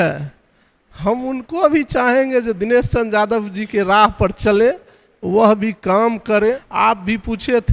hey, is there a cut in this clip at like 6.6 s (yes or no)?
yes